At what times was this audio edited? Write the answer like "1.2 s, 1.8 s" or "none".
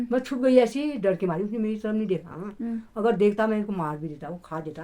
none